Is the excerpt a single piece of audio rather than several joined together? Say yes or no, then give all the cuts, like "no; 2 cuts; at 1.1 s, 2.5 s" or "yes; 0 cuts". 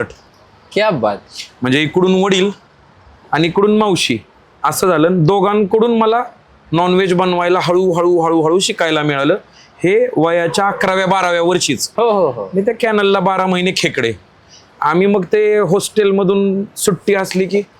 no; 1 cut; at 11.9 s